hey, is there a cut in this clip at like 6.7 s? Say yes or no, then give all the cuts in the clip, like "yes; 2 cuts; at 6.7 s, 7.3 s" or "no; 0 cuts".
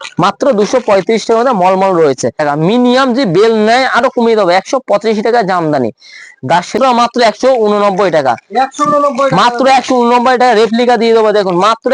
yes; 2 cuts; at 2.4 s, 6.7 s